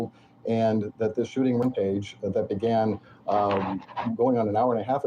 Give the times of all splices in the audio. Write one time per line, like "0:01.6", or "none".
0:01.6